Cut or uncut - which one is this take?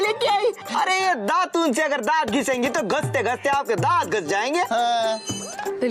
uncut